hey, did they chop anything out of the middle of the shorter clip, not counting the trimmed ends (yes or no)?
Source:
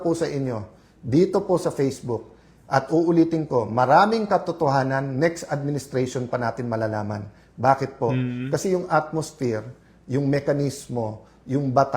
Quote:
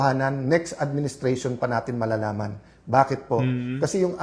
no